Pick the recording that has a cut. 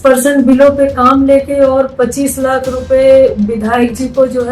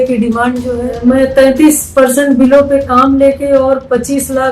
second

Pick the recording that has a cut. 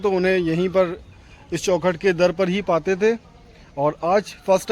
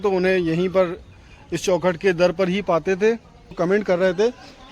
second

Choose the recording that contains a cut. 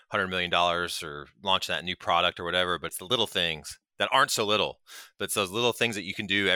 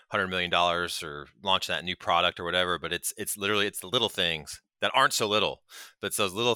first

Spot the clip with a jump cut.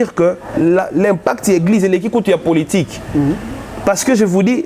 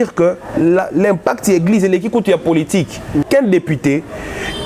second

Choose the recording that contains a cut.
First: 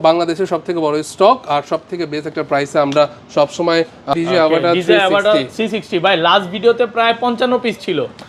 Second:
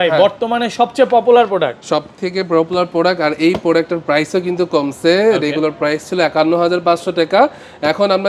first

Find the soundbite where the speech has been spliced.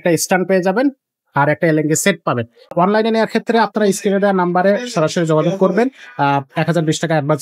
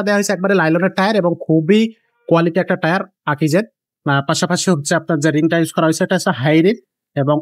first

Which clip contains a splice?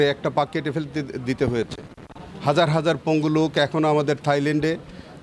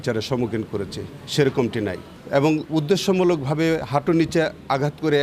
second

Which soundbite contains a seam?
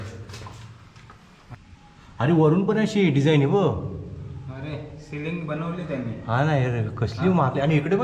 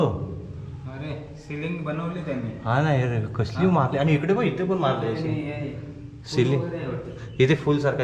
first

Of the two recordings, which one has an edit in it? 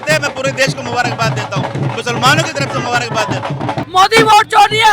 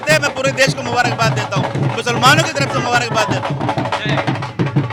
first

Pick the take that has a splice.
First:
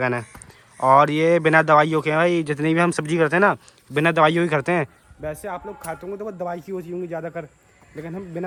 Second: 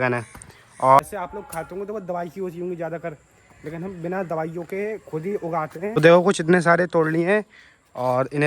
second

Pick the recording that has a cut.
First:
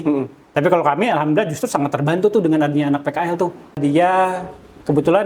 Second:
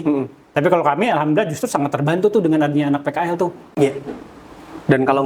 first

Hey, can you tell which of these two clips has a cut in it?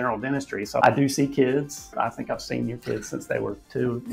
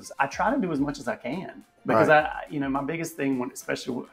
first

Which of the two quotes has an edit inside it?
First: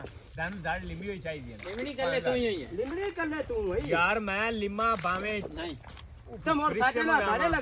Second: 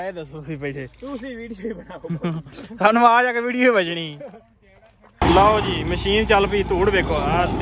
second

